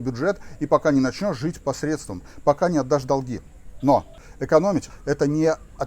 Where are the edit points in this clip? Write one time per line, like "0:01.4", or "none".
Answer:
0:04.7